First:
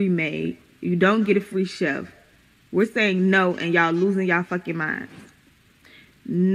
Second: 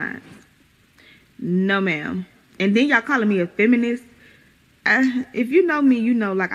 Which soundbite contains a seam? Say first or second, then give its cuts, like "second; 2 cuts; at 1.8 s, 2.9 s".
first; 1 cut; at 1.1 s